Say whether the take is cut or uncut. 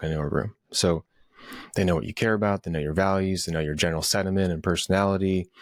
uncut